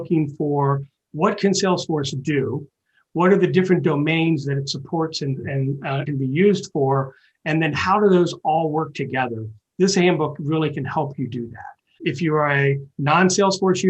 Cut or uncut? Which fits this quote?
cut